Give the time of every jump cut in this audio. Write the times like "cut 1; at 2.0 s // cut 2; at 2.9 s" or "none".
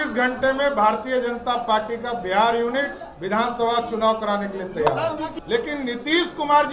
cut 1; at 5.3 s